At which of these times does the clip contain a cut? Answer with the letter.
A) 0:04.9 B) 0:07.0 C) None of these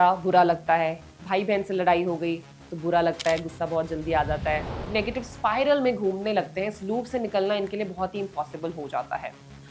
A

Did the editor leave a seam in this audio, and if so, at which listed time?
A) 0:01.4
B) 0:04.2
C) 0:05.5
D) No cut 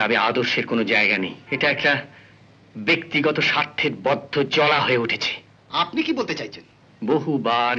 A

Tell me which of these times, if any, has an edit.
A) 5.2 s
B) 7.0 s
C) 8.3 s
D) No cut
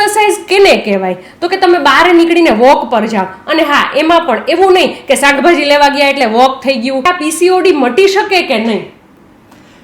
B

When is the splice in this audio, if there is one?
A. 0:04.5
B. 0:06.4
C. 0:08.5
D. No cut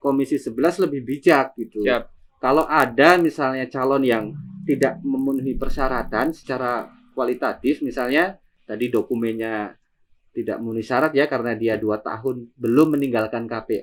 D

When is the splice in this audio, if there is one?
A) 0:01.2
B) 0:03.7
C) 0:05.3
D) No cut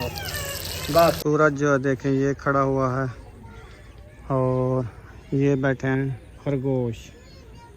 A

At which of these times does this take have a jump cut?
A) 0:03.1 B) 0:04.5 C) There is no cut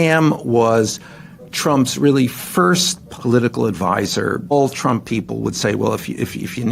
B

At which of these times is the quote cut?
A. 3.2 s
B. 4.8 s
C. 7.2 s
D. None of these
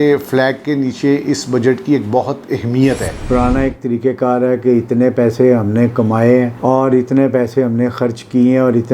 A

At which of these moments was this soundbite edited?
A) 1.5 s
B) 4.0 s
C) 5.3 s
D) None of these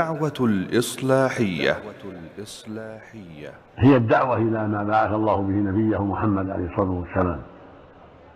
A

